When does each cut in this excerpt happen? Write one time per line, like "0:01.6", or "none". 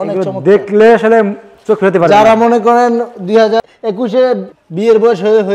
0:03.6
0:04.6

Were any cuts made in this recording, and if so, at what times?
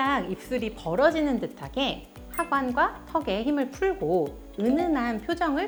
none

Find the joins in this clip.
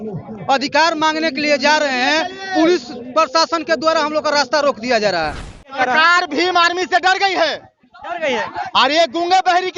0:05.8

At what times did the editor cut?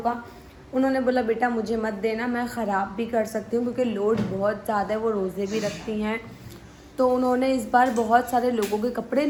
none

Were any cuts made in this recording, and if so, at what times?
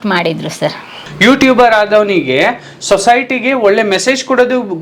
0:00.9

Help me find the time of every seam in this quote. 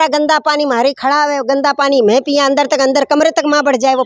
none

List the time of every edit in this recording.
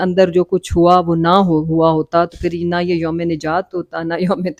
none

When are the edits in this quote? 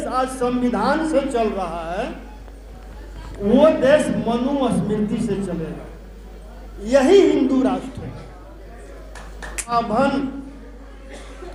0:09.7

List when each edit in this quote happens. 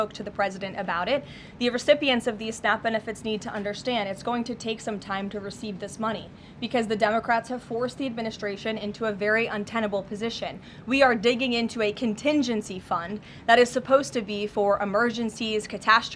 none

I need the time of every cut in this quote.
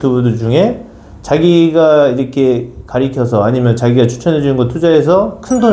none

